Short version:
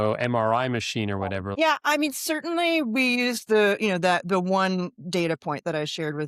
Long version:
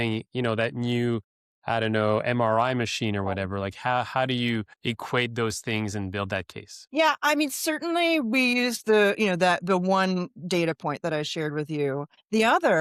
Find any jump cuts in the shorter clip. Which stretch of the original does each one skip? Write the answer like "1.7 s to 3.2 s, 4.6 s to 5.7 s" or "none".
3.5 s to 6.8 s